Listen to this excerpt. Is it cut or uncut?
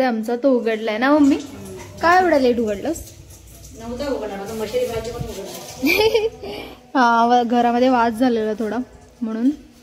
uncut